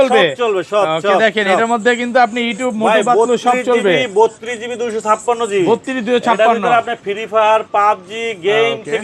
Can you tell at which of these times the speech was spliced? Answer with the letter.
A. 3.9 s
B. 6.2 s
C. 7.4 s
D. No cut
D